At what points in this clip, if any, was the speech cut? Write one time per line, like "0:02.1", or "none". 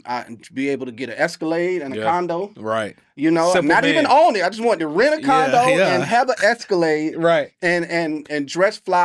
none